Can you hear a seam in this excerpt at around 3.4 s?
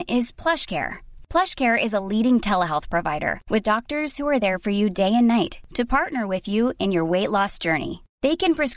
no; 0 cuts

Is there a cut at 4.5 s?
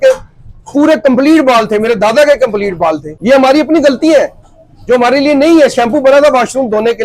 no; 1 cut; at 3.1 s

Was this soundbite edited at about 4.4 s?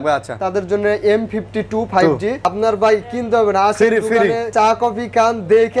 yes; 2 cuts; at 2.5 s, 4.4 s

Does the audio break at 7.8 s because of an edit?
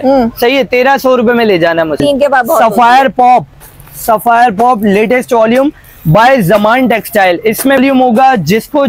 yes; 2 cuts; at 2.0 s, 7.8 s

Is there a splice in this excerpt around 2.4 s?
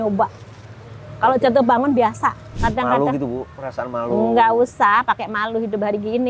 yes; 1 cut; at 2.4 s

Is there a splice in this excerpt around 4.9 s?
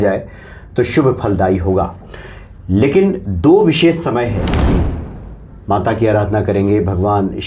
yes; 1 cut; at 4.9 s

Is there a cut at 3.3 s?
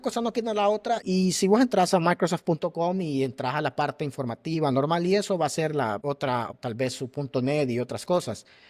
no; 2 cuts; at 1.0 s, 6.5 s

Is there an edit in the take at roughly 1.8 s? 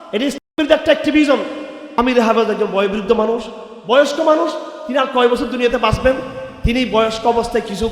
yes; 1 cut; at 1.8 s

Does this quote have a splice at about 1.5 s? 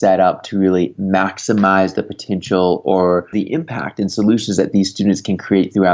no; 1 cut; at 3.3 s

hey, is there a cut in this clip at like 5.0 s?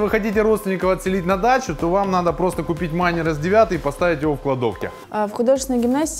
yes; 1 cut; at 5.0 s

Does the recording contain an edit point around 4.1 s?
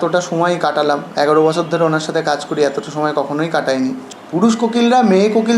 yes; 1 cut; at 4.1 s

